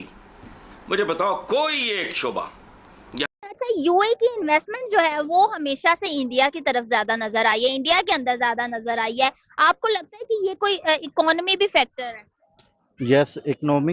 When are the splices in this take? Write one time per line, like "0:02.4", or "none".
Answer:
0:03.4